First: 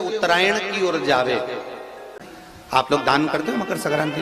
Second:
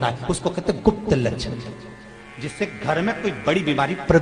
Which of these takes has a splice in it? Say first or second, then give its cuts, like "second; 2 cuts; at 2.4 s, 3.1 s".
first; 1 cut; at 2.1 s